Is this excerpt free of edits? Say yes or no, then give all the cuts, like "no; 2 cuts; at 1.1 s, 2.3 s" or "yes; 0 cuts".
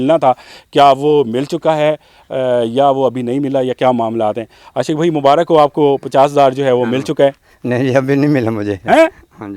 yes; 0 cuts